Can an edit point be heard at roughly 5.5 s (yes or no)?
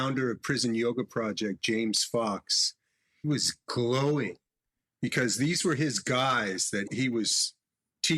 no